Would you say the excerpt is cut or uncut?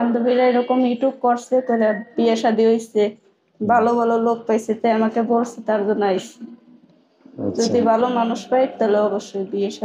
uncut